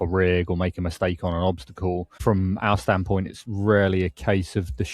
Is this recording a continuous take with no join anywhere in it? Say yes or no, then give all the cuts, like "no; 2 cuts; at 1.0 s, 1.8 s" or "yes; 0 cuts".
no; 1 cut; at 2.2 s